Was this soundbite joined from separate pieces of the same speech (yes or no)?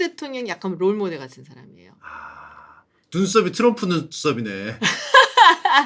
no